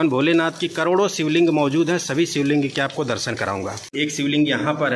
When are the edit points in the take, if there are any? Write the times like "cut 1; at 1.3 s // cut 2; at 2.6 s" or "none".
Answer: cut 1; at 3.8 s